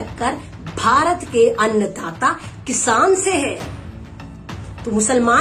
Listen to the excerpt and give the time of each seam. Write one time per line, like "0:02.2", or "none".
none

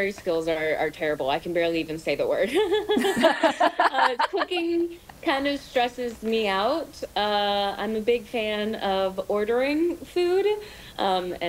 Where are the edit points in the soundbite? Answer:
none

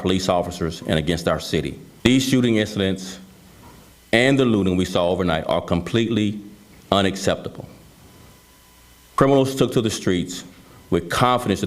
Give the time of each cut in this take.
0:01.8

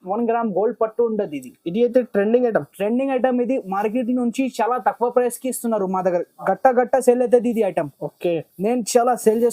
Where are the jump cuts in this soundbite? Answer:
none

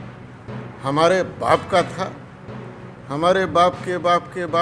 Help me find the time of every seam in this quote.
none

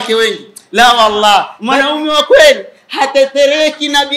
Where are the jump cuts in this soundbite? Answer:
0:01.6

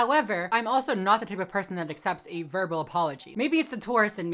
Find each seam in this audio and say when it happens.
0:03.2

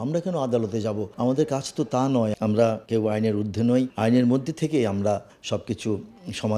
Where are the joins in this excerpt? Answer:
0:01.1
0:02.7
0:03.9
0:05.3

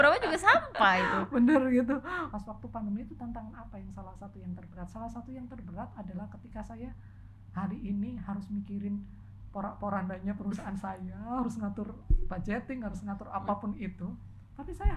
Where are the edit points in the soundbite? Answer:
0:02.2

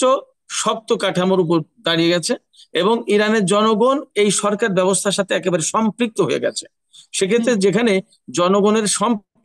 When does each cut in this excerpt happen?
none

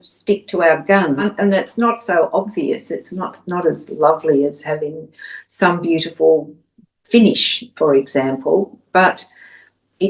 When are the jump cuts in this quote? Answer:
0:01.2

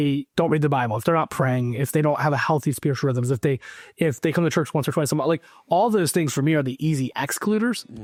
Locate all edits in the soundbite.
none

